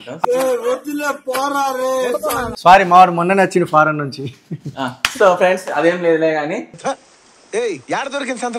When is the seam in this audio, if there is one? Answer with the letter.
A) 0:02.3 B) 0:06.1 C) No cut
A